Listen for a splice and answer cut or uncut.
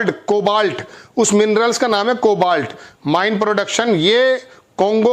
uncut